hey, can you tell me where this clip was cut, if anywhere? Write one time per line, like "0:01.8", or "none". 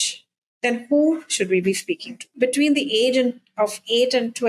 0:02.4